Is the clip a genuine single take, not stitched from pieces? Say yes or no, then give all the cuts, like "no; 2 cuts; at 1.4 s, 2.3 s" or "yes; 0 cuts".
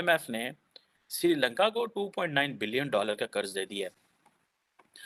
yes; 0 cuts